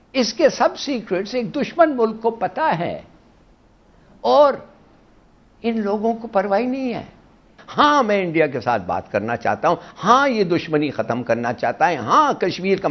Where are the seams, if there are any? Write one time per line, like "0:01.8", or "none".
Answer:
0:07.5